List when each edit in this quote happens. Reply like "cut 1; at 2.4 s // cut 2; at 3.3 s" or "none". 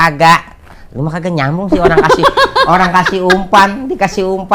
none